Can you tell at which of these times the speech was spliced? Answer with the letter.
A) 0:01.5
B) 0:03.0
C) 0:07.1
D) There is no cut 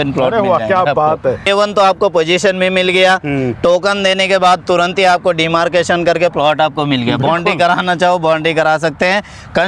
A